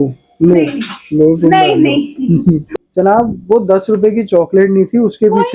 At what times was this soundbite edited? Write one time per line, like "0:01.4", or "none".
0:02.6